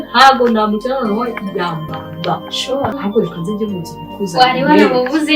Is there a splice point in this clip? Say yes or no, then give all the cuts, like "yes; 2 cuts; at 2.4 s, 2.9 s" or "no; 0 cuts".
yes; 1 cut; at 3.0 s